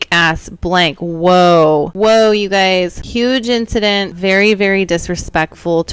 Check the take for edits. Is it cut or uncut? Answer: cut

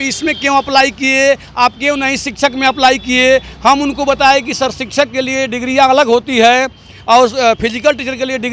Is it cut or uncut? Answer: uncut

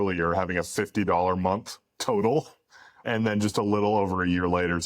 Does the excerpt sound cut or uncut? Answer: cut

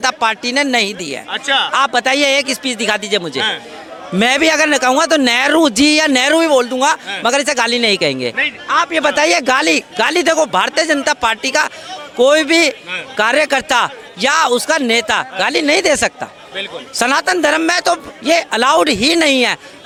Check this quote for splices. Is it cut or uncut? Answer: uncut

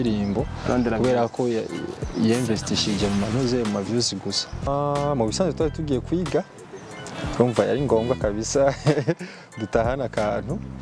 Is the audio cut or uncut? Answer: cut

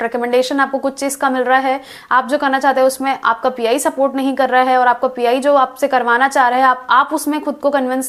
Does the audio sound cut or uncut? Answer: uncut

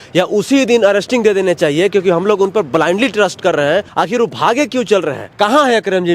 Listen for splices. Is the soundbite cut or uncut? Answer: cut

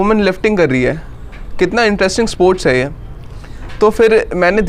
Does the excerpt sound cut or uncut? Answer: uncut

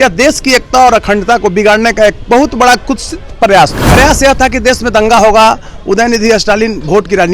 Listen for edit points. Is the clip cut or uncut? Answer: cut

